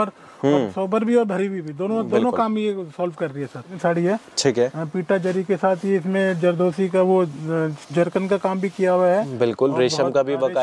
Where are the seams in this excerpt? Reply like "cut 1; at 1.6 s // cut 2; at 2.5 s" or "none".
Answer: cut 1; at 3.7 s